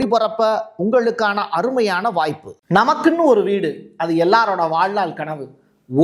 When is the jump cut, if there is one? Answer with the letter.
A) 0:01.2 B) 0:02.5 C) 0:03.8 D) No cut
B